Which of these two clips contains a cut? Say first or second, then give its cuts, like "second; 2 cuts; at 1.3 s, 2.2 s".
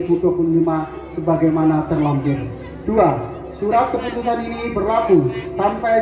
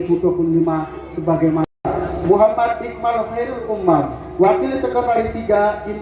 second; 1 cut; at 1.6 s